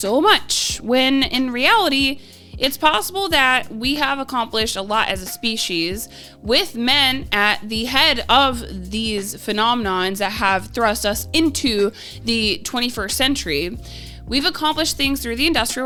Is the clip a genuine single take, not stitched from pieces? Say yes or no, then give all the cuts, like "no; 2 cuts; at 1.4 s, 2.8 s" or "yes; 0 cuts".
yes; 0 cuts